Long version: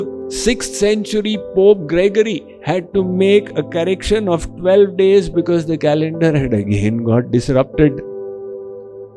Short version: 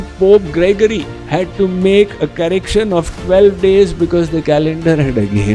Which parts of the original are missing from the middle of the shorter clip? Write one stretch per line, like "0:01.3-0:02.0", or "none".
none